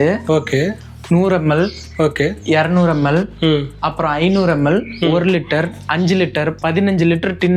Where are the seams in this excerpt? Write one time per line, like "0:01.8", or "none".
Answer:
none